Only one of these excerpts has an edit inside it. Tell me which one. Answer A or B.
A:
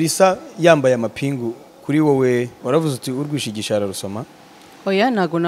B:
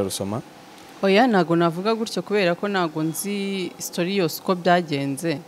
A